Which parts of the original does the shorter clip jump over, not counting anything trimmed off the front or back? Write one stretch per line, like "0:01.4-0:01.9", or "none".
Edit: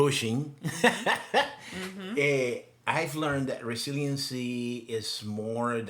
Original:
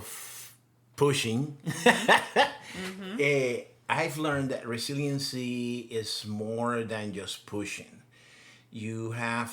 none

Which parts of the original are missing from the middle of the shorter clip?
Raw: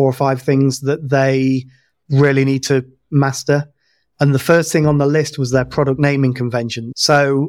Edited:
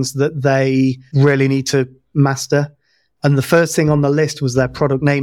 0:01.7-0:02.0

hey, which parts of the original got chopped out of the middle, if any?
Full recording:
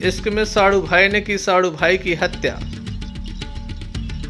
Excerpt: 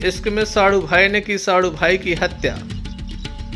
0:02.6-0:02.8

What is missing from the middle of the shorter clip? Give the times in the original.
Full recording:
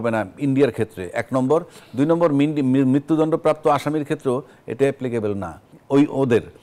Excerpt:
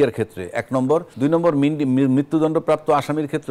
0:01.7-0:01.9

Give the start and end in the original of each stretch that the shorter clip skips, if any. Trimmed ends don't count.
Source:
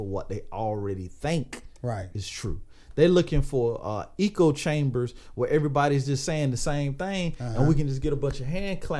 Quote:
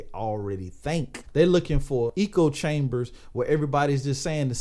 0:01.6-0:02.8
0:03.7-0:04.1

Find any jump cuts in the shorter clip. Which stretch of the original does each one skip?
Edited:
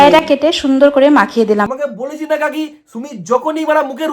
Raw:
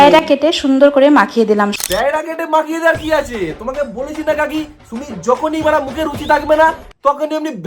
0:01.7-0:03.6

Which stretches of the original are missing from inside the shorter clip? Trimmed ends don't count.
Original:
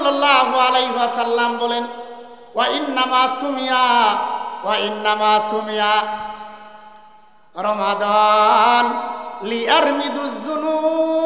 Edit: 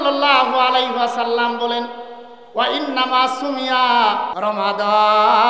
0:04.3-0:07.5

